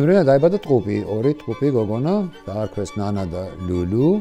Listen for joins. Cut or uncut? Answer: uncut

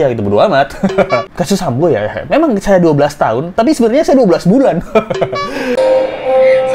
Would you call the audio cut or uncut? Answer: cut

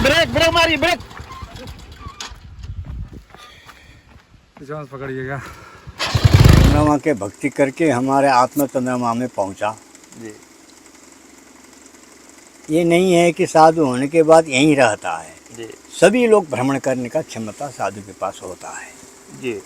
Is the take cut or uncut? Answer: cut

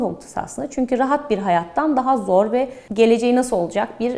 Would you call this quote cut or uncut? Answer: cut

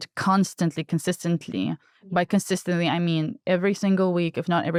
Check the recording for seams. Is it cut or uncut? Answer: uncut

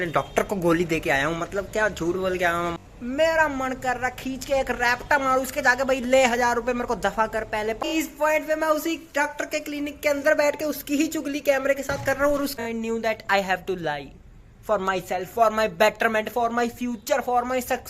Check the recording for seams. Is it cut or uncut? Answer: cut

